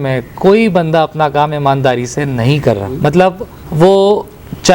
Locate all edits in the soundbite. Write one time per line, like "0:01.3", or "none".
0:03.0